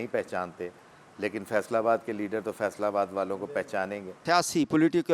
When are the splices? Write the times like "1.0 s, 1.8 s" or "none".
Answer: 4.2 s